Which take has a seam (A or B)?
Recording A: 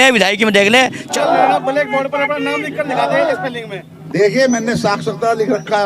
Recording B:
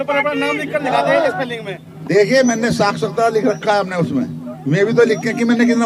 A